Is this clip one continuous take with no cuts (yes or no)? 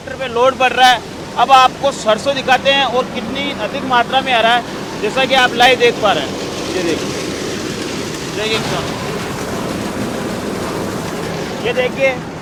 yes